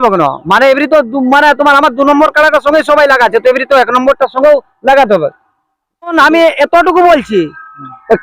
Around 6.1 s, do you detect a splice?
yes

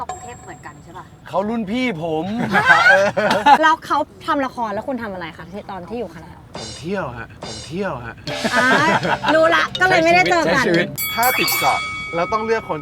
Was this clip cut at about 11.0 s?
yes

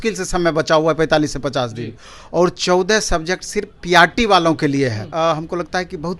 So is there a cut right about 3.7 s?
no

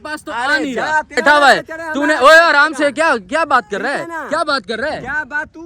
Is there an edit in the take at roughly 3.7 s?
no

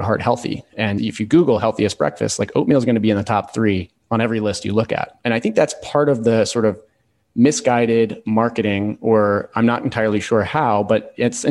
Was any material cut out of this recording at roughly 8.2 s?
no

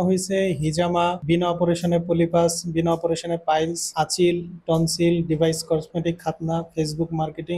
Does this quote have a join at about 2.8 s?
no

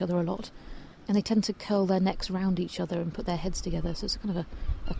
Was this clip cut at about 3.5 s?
no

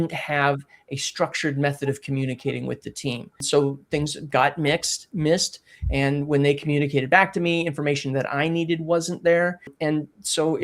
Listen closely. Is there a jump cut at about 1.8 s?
no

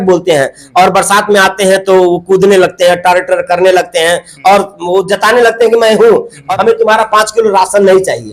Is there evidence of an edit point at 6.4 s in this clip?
yes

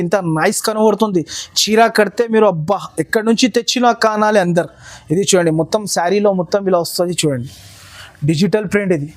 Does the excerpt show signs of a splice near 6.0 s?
no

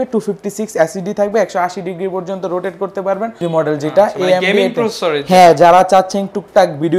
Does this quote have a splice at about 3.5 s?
yes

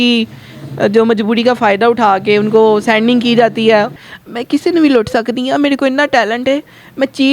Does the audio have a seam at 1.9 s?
no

